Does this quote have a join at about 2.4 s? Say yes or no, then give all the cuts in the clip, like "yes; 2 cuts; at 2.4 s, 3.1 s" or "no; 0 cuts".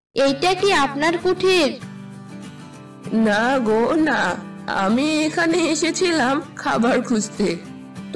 no; 0 cuts